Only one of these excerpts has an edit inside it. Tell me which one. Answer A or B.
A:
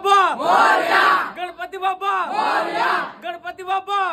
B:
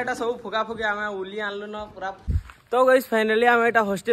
B